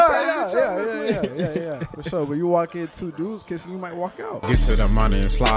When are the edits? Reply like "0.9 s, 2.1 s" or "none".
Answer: 4.4 s